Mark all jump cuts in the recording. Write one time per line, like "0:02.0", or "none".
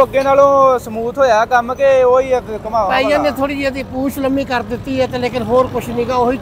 none